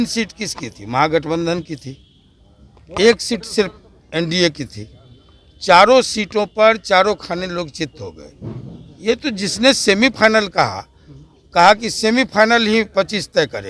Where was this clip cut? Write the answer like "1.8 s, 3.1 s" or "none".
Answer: none